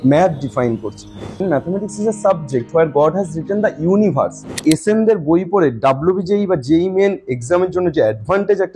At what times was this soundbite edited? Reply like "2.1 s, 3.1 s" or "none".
1.3 s, 4.6 s